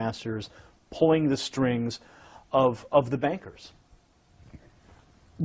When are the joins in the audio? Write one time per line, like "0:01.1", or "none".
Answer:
0:01.2